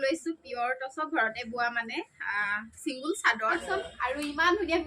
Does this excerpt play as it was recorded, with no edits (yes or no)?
no